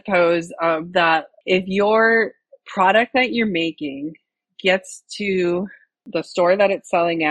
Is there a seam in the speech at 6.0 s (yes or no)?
yes